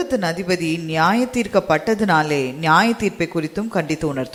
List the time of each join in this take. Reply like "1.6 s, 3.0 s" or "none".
none